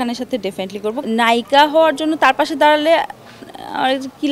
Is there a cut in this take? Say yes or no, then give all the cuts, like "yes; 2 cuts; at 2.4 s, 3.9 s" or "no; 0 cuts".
yes; 1 cut; at 1.0 s